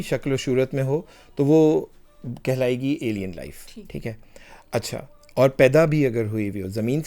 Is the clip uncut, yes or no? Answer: yes